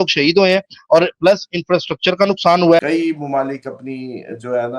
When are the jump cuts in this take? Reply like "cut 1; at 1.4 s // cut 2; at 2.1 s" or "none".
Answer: cut 1; at 2.8 s